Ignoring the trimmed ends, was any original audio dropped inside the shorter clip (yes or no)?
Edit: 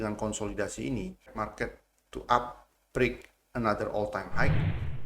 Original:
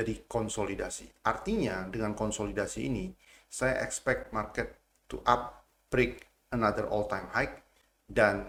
yes